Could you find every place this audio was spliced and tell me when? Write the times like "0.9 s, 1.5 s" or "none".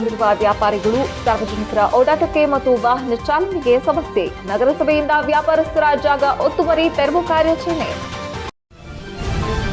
8.4 s

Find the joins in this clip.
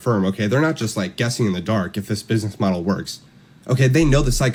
none

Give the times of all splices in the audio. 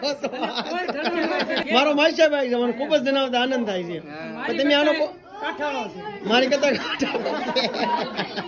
1.5 s

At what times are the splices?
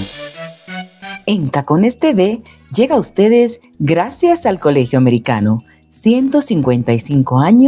1.0 s

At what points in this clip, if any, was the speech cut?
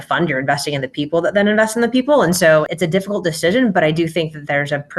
2.7 s

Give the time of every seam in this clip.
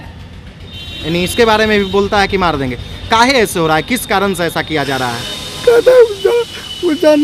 none

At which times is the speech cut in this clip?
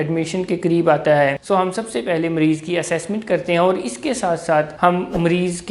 1.4 s, 4.7 s

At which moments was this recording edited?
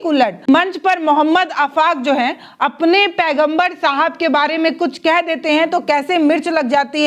none

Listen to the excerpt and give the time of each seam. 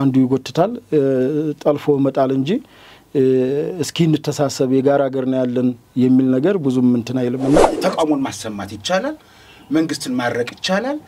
7.7 s

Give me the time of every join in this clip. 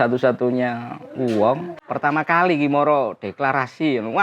1.7 s

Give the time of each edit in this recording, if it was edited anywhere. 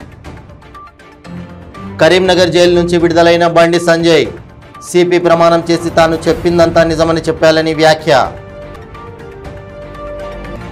none

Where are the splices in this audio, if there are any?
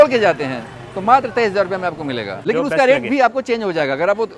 2.4 s

